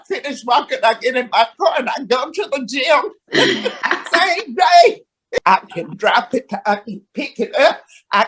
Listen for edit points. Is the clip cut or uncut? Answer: cut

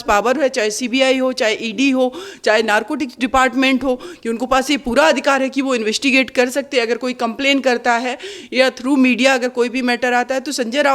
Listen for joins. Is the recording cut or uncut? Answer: uncut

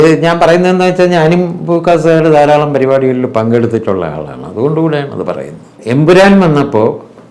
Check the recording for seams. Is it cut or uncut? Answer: cut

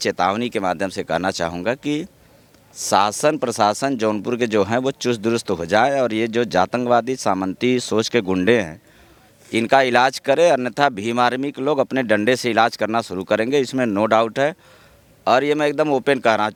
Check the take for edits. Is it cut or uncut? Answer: uncut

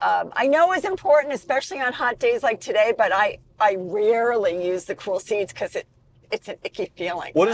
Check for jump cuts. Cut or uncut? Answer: uncut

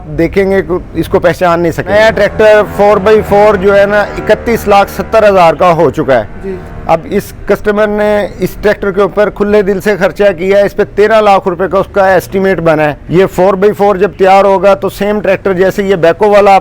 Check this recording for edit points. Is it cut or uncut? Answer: cut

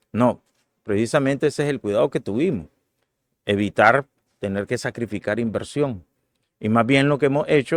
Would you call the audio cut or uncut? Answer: uncut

